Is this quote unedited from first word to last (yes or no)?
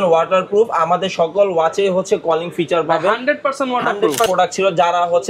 no